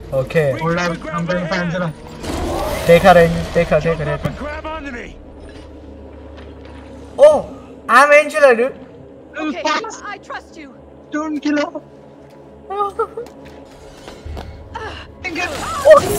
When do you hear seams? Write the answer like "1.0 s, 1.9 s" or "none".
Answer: 13.7 s